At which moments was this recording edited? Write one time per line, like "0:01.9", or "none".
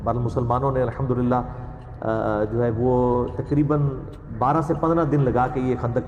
none